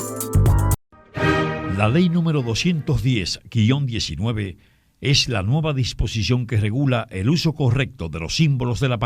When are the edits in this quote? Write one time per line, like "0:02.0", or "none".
0:00.9

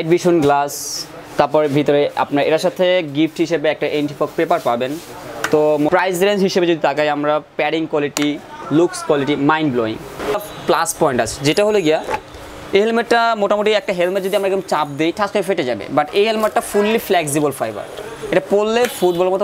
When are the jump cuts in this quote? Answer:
0:06.0
0:10.4

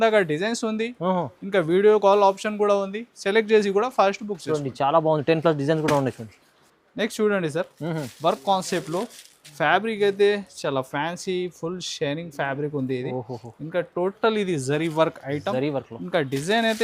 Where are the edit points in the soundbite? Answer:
none

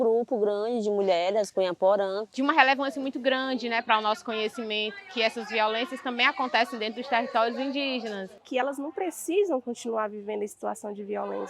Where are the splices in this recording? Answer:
0:02.3
0:08.4

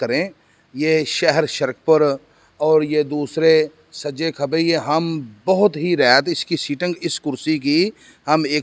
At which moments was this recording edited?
none

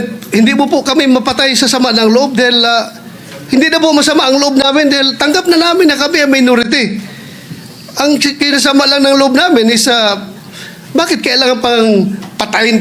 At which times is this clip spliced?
none

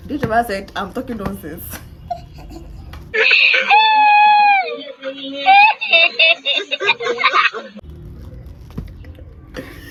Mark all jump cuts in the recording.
none

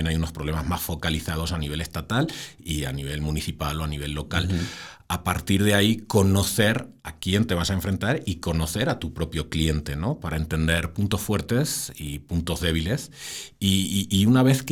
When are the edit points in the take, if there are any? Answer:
none

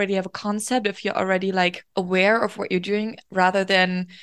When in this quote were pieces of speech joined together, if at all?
0:01.8

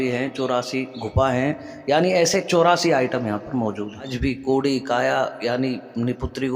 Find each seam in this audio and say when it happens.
0:04.1

